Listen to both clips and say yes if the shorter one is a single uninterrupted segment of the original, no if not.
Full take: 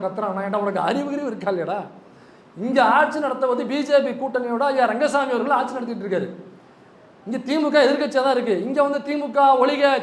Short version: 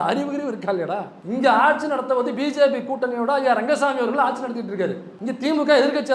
no